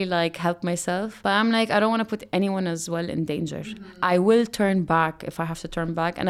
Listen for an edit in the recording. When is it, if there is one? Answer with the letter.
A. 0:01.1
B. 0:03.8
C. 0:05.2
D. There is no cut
A